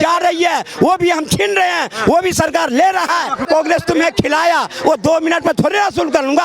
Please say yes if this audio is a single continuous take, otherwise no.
no